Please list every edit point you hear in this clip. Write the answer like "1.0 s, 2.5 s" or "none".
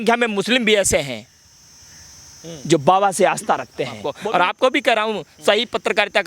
4.1 s